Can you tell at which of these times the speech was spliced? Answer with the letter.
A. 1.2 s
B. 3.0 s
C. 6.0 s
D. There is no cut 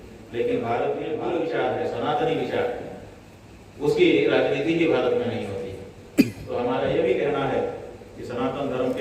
A